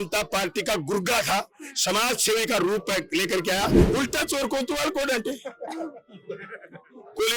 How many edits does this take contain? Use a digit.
1